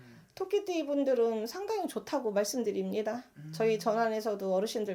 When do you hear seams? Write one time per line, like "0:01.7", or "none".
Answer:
none